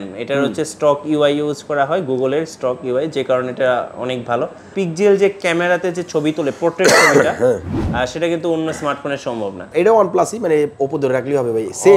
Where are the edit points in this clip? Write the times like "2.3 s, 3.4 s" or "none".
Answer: 4.7 s, 9.7 s